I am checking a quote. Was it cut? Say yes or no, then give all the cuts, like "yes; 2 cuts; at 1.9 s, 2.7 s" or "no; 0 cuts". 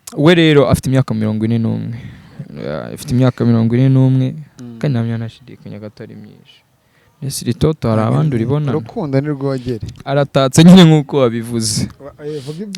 yes; 1 cut; at 9.9 s